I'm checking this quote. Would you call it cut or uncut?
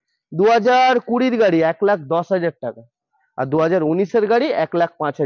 uncut